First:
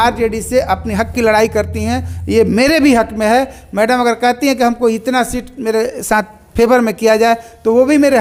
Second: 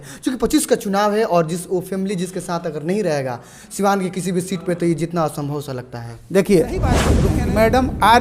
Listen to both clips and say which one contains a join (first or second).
second